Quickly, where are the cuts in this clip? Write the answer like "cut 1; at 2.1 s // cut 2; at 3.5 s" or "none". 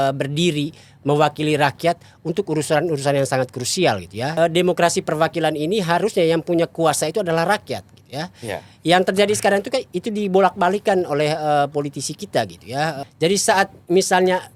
cut 1; at 4.3 s // cut 2; at 13.0 s